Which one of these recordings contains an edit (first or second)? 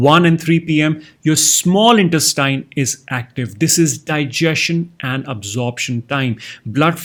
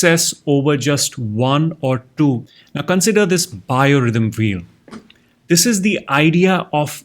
second